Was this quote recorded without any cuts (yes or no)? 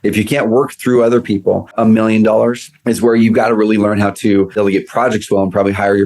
no